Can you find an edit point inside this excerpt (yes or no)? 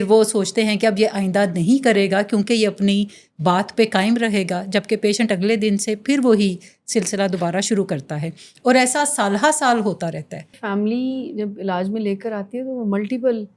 yes